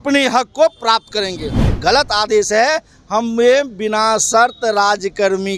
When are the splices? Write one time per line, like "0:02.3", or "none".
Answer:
0:01.6